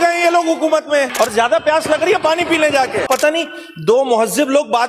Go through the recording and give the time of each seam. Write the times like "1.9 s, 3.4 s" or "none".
1.1 s, 3.0 s